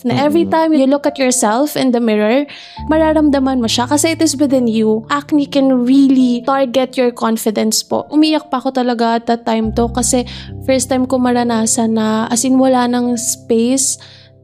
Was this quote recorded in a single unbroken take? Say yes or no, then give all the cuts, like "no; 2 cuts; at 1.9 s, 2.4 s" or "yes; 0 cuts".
no; 5 cuts; at 0.8 s, 2.8 s, 5.1 s, 6.4 s, 8.1 s